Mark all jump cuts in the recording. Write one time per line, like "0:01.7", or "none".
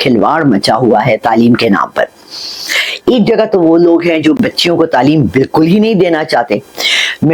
none